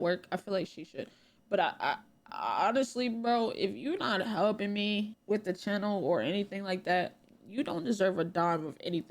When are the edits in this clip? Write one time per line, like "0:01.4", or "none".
none